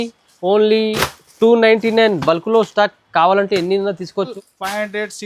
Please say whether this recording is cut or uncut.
cut